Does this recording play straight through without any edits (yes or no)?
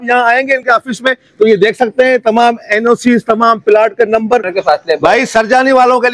no